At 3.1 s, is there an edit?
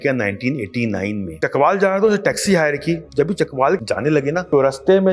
yes; 3 cuts; at 1.3 s, 3.1 s, 3.9 s

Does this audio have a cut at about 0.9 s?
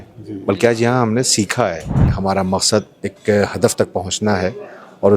no; 1 cut; at 2.2 s

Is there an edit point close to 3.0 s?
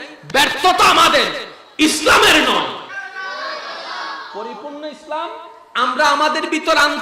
yes; 1 cut; at 3.0 s

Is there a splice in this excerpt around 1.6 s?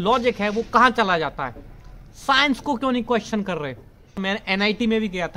no; 1 cut; at 4.2 s

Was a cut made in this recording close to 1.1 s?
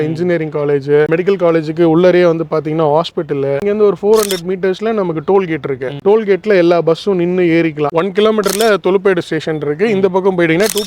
yes; 3 cuts; at 1.1 s, 3.6 s, 7.8 s

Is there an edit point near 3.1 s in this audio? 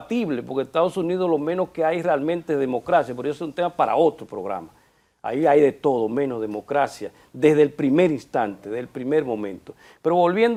no; 0 cuts

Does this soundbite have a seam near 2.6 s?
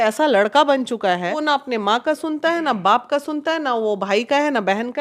no; 1 cut; at 1.4 s

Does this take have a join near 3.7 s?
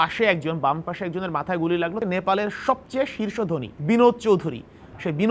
yes; 2 cuts; at 2.0 s, 3.7 s

